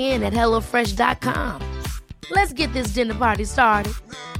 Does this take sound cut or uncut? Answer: uncut